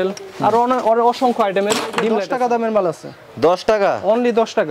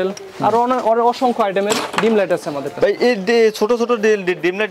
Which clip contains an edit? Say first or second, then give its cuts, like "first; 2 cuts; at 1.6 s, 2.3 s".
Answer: first; 1 cut; at 2.2 s